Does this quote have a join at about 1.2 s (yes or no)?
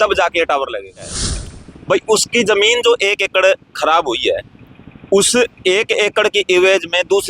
yes